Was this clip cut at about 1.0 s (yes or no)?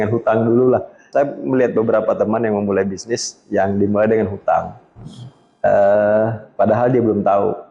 yes